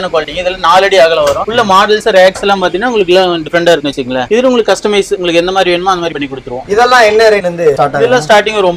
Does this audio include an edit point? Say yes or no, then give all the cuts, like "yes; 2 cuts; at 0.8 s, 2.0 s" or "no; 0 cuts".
no; 0 cuts